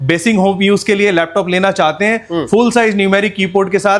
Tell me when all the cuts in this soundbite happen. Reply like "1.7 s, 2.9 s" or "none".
none